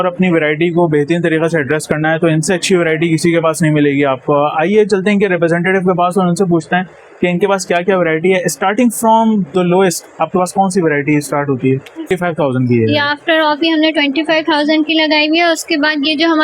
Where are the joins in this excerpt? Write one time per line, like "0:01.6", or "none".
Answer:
0:12.1